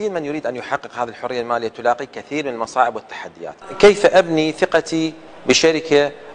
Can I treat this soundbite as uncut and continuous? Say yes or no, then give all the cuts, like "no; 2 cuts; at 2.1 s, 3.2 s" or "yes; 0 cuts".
no; 1 cut; at 3.6 s